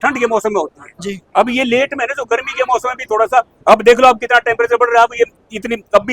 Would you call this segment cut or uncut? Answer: uncut